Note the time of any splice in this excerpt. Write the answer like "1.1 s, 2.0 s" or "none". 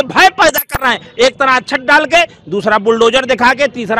none